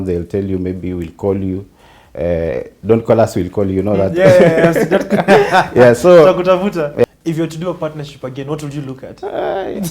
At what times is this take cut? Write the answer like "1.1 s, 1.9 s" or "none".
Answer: 7.0 s